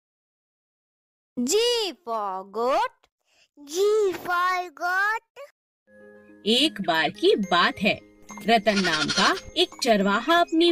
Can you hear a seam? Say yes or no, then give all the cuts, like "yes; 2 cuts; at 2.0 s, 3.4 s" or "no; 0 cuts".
no; 0 cuts